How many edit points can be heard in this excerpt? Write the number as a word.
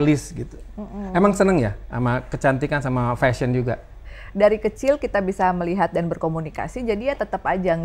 one